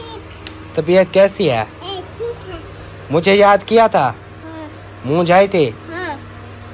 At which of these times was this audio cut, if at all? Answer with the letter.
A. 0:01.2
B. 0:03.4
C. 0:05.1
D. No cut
D